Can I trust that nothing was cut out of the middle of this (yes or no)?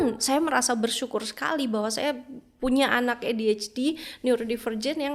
yes